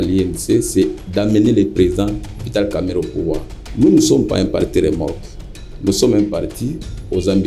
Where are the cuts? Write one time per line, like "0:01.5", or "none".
0:03.6